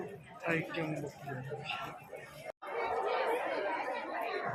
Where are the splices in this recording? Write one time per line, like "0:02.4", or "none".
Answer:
none